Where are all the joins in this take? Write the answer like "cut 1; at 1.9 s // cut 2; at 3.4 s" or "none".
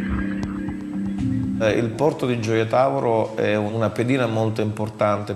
cut 1; at 1.8 s